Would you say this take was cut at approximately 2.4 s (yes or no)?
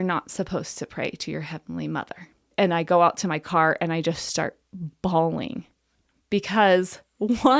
yes